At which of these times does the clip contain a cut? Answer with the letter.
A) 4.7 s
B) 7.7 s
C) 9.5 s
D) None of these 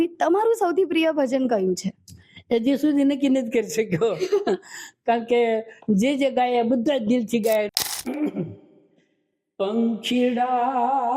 B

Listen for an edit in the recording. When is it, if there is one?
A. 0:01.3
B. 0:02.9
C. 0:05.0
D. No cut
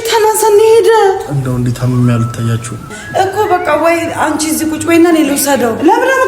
B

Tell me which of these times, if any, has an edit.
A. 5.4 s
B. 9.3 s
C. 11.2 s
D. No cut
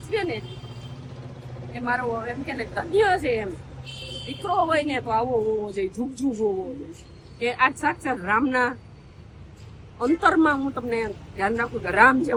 D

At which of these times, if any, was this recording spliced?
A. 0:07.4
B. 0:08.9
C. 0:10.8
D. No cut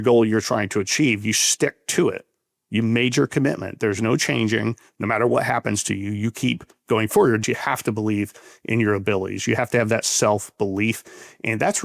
A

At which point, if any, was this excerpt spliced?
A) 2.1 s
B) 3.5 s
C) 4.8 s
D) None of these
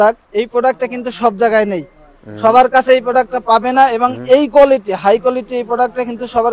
D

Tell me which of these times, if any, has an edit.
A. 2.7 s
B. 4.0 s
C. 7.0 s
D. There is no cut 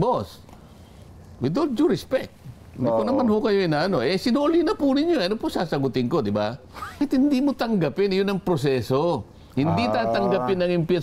C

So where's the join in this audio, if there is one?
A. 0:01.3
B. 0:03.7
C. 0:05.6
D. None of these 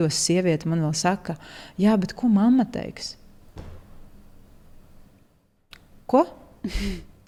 D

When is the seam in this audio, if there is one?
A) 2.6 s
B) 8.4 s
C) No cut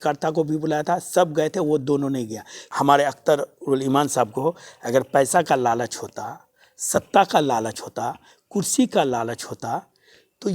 A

